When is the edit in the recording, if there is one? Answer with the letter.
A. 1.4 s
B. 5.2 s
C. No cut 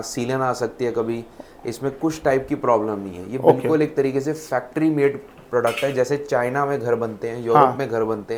C